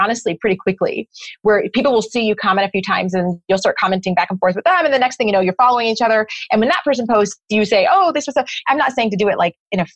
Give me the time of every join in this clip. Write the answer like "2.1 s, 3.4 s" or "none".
none